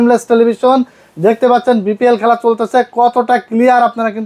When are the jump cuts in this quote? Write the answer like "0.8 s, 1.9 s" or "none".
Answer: none